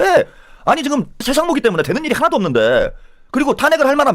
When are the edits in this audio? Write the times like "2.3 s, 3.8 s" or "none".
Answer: 1.2 s

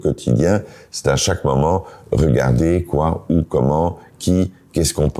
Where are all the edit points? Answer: none

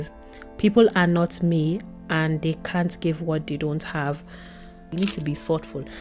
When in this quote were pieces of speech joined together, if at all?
4.8 s

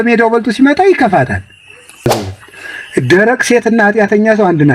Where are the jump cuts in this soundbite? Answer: 2.1 s

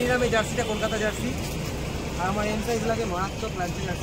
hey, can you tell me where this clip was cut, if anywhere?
none

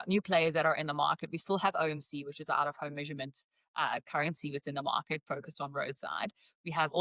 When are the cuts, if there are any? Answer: none

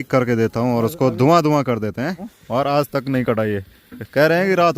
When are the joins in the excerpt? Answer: 0.9 s, 2.3 s

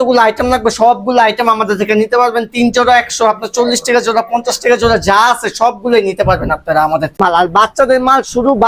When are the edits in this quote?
7.2 s

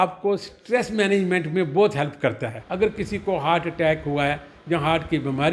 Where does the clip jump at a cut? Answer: 2.6 s

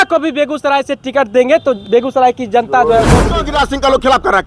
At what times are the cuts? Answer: 3.4 s

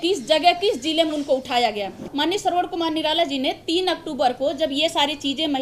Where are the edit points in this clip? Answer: 2.1 s

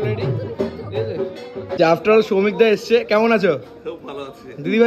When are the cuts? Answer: 1.8 s

